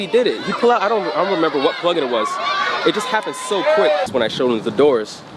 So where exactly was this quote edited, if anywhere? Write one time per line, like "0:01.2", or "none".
0:04.1

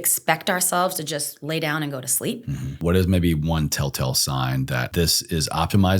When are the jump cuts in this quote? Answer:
0:02.7
0:04.9

